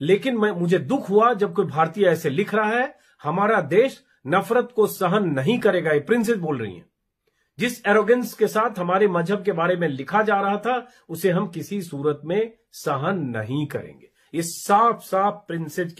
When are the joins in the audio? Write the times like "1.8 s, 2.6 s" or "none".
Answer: none

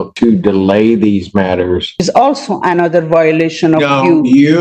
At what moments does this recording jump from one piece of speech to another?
1.9 s

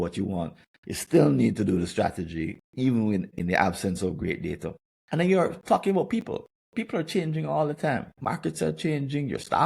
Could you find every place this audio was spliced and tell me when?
3.3 s, 8.1 s

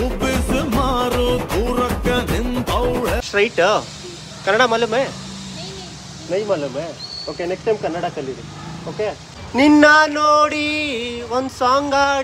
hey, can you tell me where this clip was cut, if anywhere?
9.3 s

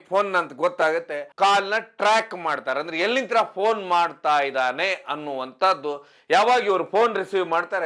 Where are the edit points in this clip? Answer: 1.2 s

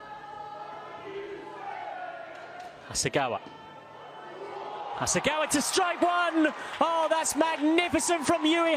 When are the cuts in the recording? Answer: none

